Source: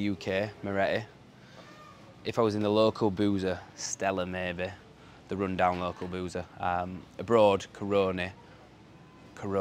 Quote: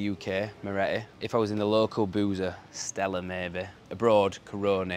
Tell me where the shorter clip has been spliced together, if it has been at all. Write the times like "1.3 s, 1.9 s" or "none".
1.2 s, 3.8 s